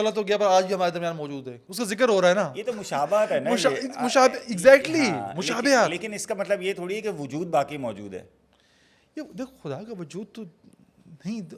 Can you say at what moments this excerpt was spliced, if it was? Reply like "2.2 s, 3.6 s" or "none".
none